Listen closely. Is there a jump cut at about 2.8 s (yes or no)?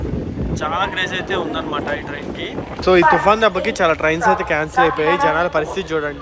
yes